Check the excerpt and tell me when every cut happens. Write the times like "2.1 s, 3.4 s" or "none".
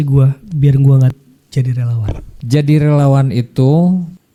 none